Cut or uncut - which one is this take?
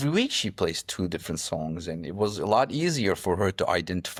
uncut